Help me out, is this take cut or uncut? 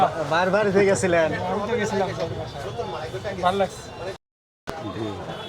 cut